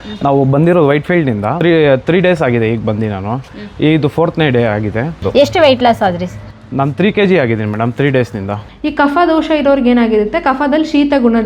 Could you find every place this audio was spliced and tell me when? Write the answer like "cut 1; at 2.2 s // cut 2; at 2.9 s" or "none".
cut 1; at 1.5 s // cut 2; at 5.2 s // cut 3; at 8.6 s